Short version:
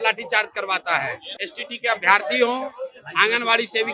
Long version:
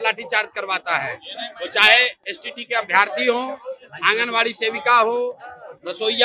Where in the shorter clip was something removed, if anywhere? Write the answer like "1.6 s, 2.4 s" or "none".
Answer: 1.4 s